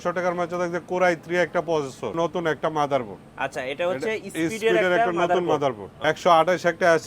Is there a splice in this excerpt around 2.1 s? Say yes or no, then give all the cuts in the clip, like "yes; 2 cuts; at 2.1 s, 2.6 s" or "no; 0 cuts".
yes; 2 cuts; at 2.1 s, 5.9 s